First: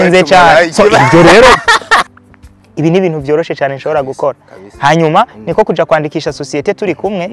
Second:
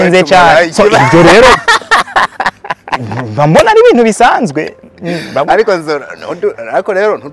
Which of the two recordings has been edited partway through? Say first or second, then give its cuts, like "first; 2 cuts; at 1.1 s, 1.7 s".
first; 1 cut; at 2.1 s